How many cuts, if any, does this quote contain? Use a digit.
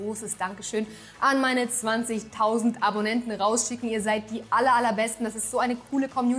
0